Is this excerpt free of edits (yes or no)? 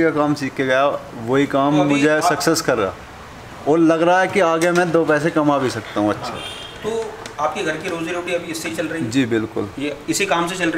yes